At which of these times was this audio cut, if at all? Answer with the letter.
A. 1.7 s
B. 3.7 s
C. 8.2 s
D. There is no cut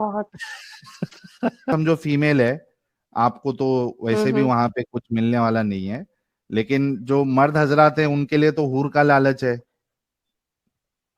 A